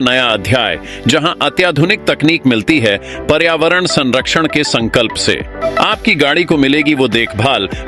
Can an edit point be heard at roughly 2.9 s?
no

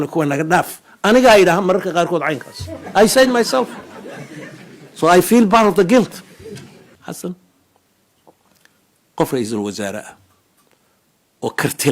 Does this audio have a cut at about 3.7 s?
no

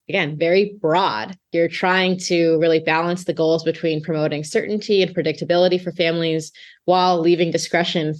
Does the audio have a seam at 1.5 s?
yes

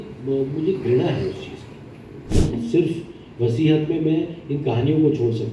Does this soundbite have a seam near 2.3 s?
yes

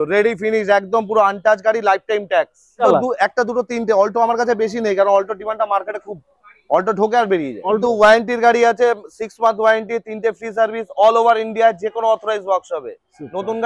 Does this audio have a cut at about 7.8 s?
yes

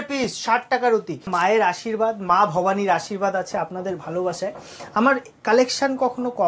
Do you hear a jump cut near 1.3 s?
yes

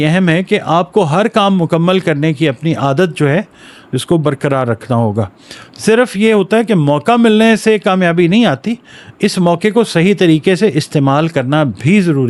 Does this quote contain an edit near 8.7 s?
no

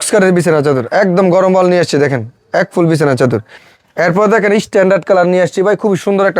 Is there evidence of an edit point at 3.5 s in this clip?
yes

